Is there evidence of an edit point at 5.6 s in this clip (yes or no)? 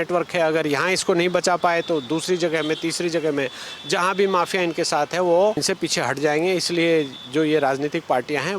yes